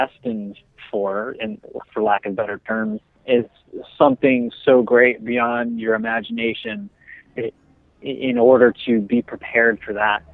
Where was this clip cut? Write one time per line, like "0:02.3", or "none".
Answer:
0:03.1
0:07.3